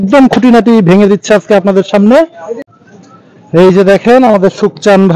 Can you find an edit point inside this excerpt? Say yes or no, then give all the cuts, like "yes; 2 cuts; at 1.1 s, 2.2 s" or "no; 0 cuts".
yes; 1 cut; at 2.6 s